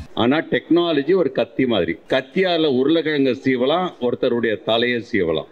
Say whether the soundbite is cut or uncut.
cut